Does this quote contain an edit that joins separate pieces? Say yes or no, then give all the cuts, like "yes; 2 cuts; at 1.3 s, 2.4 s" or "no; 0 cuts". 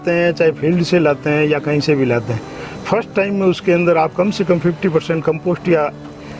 no; 0 cuts